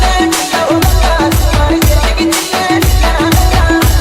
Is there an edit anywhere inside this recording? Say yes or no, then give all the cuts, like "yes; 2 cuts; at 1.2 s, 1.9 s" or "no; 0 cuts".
no; 0 cuts